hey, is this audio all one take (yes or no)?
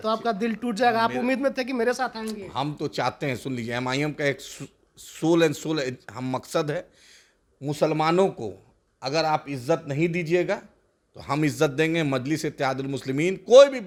yes